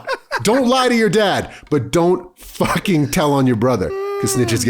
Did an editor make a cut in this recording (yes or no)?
no